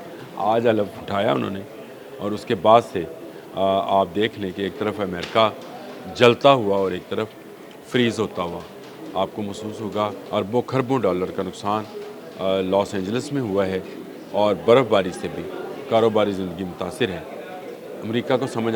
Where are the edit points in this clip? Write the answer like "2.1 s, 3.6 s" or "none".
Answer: 1.0 s, 10.2 s

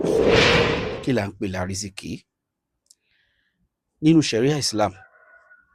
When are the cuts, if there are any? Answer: 0.9 s

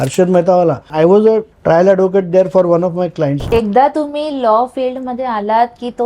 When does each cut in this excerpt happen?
0.9 s, 1.5 s, 3.4 s

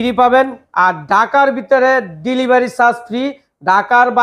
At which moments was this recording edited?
none

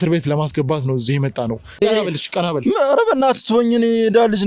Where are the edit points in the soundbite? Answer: 1.8 s

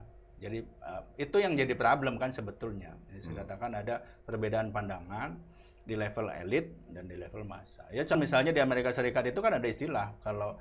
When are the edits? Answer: 8.1 s

